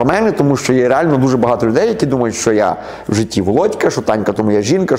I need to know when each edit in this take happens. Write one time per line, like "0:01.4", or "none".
none